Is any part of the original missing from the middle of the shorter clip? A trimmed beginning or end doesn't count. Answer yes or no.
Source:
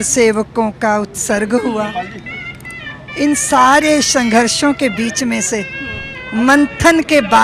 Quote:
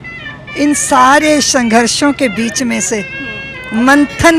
no